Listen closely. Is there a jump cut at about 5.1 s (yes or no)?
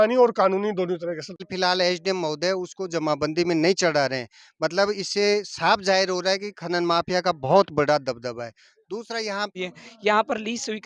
no